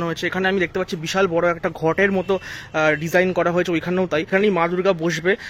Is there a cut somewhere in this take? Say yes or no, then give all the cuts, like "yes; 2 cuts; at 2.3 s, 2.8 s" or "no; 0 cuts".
yes; 1 cut; at 4.3 s